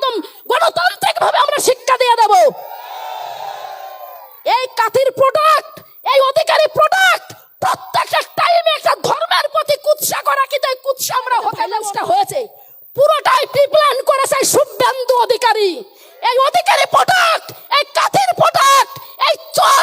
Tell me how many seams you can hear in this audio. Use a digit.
1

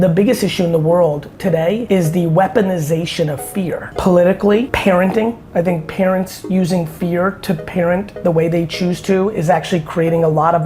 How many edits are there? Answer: 4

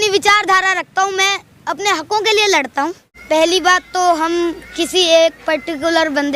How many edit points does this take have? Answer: 1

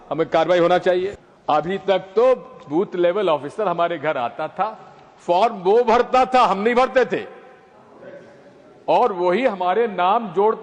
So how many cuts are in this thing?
1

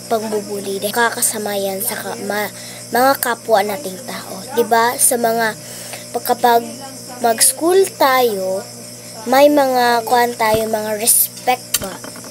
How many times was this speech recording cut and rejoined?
1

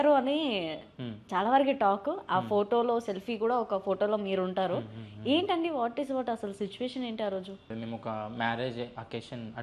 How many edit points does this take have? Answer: 1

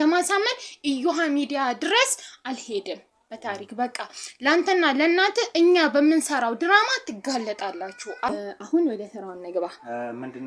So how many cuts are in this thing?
1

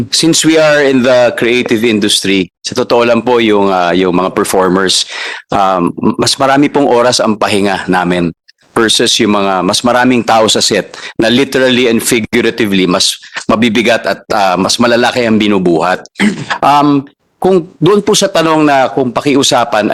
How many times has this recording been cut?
0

